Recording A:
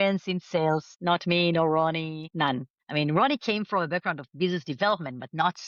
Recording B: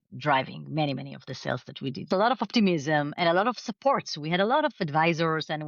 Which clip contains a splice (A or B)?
B